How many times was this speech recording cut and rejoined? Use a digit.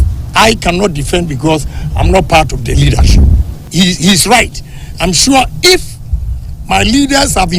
1